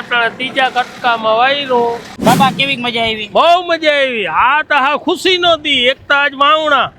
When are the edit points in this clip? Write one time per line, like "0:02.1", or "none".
0:02.1